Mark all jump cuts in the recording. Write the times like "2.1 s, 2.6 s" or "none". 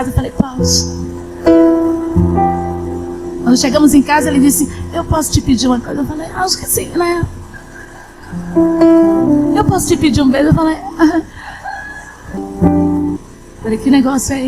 12.4 s, 13.3 s